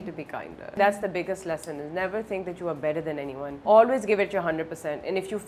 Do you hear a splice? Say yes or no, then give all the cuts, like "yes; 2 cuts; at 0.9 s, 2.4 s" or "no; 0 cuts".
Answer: yes; 2 cuts; at 0.8 s, 3.6 s